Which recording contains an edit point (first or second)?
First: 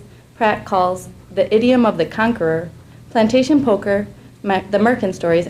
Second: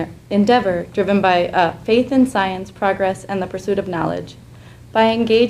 first